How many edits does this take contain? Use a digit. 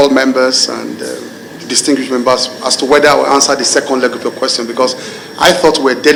0